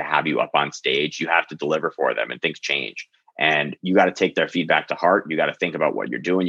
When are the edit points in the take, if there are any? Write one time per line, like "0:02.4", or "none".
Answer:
none

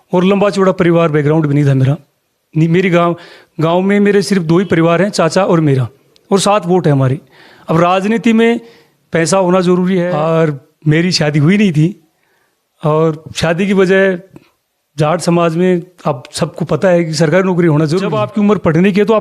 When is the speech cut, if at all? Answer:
0:10.1
0:18.2

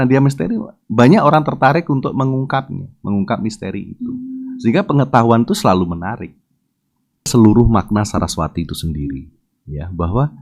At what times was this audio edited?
0:07.3

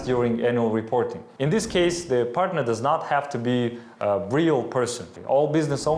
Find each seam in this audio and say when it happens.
0:01.3
0:05.1

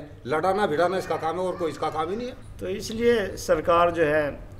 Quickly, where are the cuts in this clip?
0:02.4

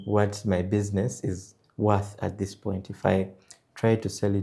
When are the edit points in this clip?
none

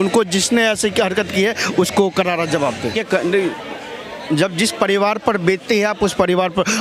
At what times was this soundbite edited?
0:03.0

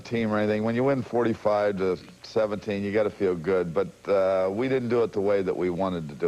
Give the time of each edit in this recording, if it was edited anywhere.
0:03.6

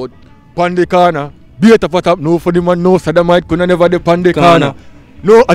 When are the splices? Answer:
none

